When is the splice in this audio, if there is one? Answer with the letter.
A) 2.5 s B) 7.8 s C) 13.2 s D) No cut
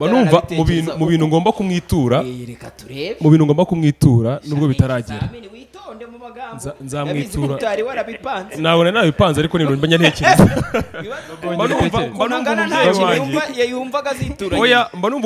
D